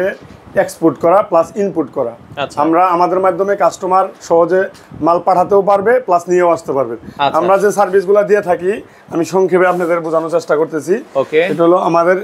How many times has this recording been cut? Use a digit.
0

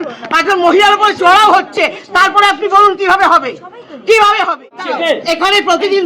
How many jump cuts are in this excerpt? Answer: 1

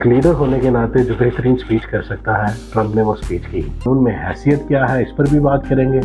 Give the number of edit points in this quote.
1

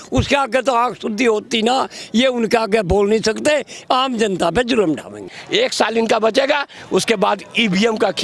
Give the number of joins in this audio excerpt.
1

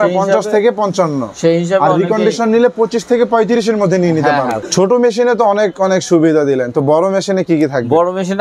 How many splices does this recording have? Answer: 1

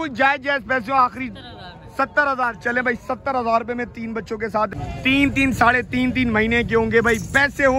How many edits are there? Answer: 1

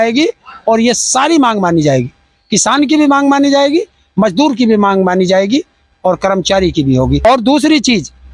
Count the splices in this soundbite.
1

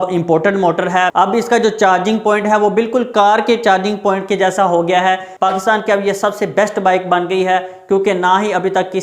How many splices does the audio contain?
2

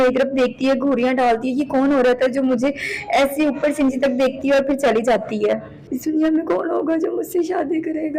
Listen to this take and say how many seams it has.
1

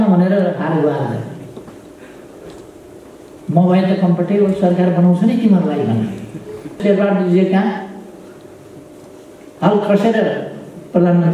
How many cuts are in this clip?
1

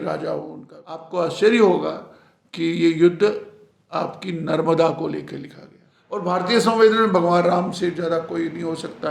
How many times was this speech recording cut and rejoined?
2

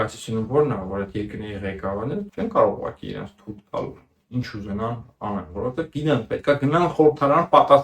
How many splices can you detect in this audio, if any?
1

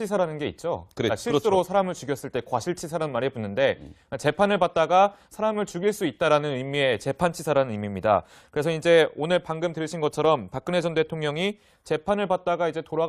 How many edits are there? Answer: 1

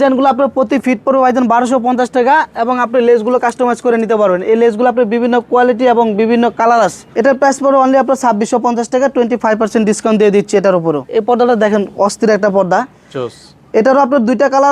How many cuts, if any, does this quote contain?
2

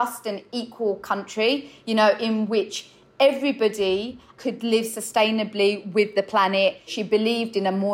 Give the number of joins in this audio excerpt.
1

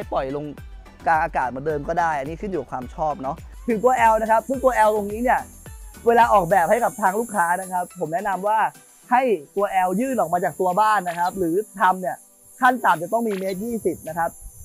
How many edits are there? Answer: 1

